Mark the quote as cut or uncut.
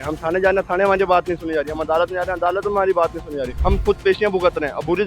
cut